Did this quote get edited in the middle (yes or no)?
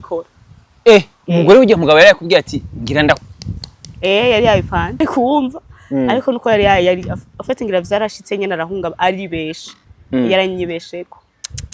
yes